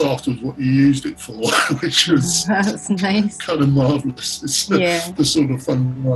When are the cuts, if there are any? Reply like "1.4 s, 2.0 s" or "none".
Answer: none

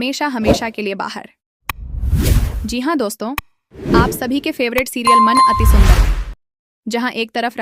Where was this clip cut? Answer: 5.0 s, 6.2 s

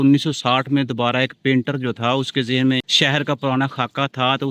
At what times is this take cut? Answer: 2.9 s

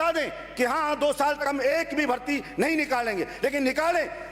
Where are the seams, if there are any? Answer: 1.4 s

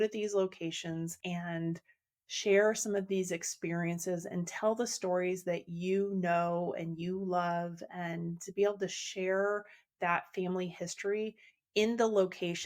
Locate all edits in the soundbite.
1.2 s

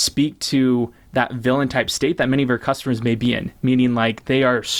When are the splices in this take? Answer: none

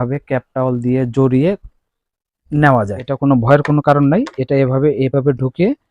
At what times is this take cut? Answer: 3.1 s

